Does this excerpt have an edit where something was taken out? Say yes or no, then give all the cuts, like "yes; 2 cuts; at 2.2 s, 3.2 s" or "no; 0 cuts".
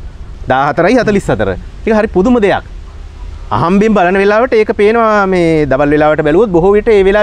no; 0 cuts